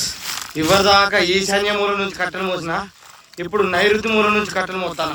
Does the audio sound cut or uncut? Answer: uncut